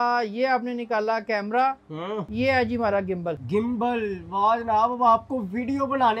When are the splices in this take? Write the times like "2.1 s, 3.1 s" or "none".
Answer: 2.3 s, 3.4 s